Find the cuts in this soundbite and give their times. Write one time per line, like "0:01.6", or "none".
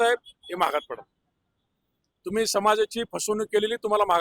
none